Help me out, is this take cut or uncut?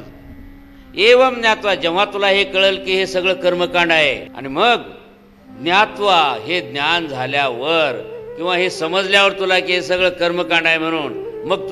cut